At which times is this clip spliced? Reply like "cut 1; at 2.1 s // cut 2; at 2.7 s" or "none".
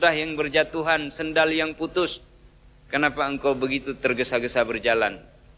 none